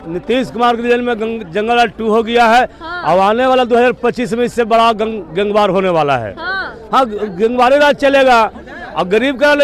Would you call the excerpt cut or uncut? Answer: uncut